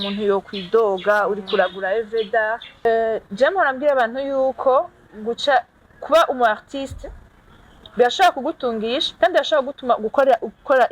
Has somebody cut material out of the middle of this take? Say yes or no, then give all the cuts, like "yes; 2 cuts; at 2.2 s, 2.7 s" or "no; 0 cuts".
yes; 1 cut; at 2.8 s